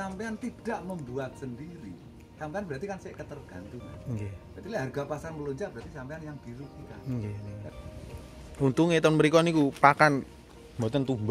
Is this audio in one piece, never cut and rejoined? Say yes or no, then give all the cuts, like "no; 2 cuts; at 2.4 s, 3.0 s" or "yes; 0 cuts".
no; 1 cut; at 7.7 s